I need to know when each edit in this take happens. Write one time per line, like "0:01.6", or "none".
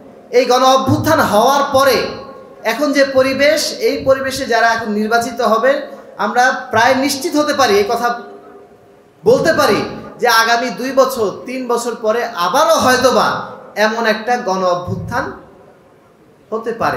none